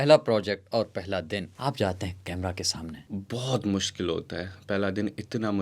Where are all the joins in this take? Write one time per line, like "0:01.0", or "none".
0:01.5
0:03.0